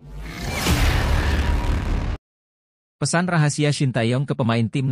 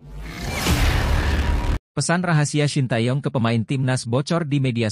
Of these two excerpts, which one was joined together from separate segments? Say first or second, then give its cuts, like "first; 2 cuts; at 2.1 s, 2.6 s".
second; 1 cut; at 1.8 s